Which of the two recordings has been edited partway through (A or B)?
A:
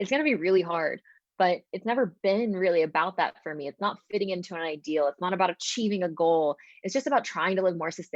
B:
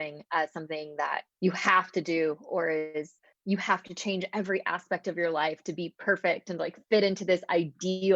B